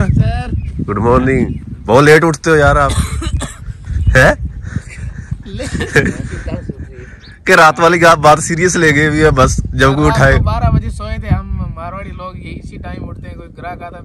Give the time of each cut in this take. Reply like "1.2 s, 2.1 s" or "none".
none